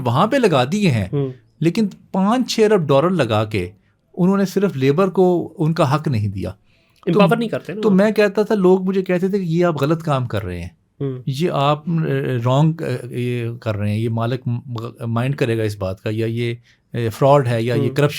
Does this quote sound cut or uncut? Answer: uncut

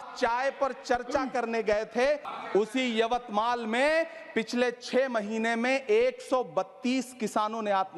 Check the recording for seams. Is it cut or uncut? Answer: cut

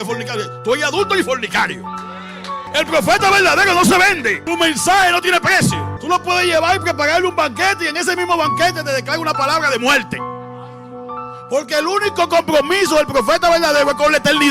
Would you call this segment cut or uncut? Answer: cut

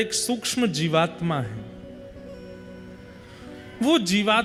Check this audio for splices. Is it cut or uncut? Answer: uncut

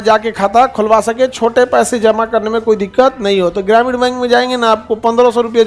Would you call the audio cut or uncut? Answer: uncut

